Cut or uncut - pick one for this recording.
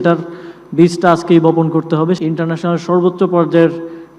cut